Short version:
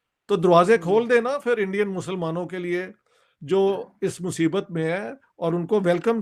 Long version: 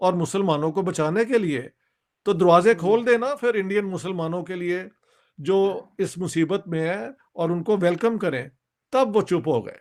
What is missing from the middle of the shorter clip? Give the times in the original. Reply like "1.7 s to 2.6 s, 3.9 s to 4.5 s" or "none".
none

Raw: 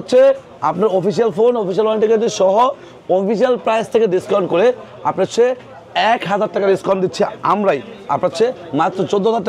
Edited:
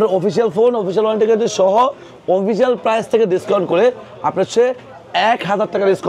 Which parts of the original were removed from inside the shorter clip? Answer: none

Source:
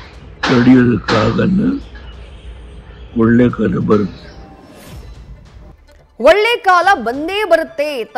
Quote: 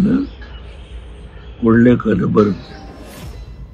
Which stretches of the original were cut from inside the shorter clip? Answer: 4.2 s to 4.4 s

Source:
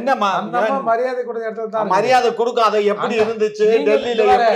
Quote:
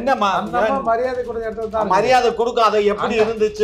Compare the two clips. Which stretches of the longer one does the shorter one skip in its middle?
none

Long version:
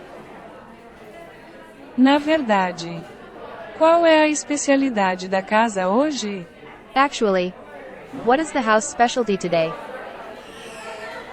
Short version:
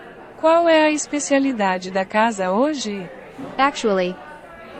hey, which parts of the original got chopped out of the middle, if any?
none

